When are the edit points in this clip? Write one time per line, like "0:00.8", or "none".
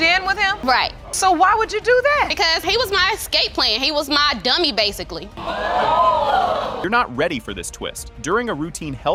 none